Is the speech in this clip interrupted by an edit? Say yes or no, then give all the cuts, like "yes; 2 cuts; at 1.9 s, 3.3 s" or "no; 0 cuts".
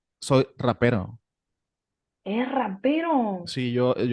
no; 0 cuts